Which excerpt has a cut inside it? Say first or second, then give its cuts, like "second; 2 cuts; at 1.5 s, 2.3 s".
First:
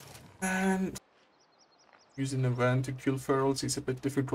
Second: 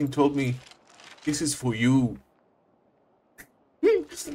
first; 1 cut; at 1.0 s